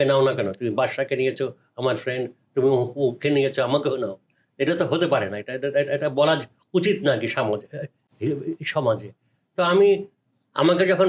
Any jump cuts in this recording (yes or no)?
no